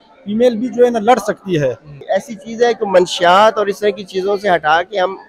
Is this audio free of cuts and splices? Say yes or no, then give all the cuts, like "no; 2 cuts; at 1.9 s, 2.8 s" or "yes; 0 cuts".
no; 1 cut; at 2.0 s